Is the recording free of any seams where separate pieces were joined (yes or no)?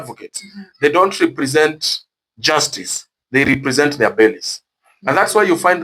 yes